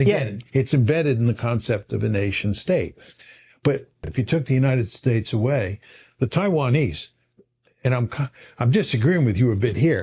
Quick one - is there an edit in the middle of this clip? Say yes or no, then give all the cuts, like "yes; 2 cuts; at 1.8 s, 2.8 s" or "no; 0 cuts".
yes; 1 cut; at 4.1 s